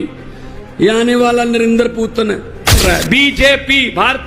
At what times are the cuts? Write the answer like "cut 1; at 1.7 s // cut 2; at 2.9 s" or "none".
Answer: cut 1; at 2.7 s